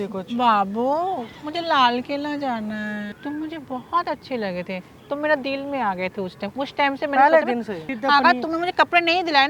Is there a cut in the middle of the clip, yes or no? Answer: yes